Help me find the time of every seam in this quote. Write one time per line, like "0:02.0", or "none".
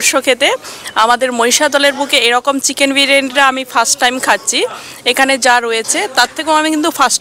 none